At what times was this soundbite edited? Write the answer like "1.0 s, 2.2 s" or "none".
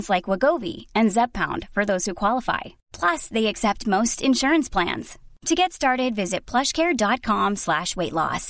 none